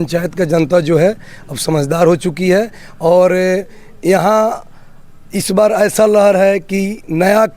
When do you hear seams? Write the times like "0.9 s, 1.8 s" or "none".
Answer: none